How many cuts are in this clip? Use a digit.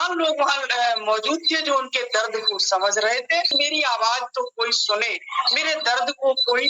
1